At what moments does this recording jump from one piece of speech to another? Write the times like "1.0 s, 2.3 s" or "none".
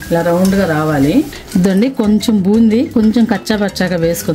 1.4 s